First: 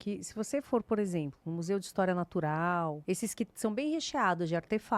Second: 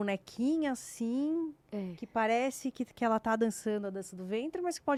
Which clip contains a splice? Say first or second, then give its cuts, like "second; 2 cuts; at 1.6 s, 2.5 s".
first; 1 cut; at 3.0 s